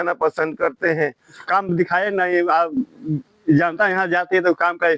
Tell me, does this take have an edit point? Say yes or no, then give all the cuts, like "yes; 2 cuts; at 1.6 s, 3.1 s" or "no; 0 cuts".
yes; 1 cut; at 1.4 s